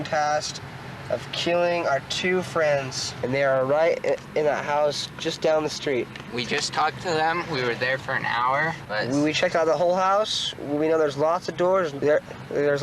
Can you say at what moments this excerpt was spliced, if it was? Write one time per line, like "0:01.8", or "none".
0:03.0
0:06.2
0:08.8
0:11.9